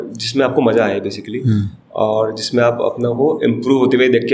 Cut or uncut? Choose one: uncut